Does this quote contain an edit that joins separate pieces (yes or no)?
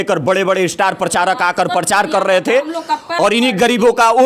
no